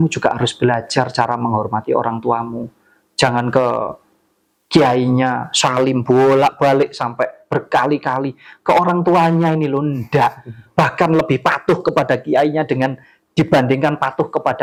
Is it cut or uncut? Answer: uncut